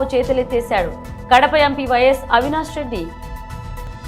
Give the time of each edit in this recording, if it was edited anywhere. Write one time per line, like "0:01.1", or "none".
none